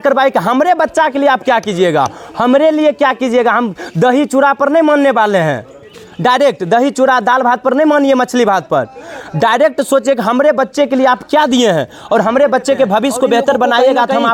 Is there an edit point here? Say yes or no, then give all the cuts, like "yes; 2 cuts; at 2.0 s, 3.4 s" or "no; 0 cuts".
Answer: no; 0 cuts